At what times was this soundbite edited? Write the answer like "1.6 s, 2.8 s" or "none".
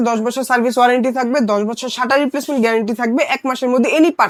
none